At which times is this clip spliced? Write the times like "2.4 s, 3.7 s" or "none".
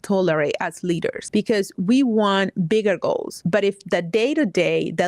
1.2 s, 3.3 s